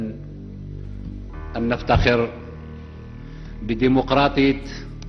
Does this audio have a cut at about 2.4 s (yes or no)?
no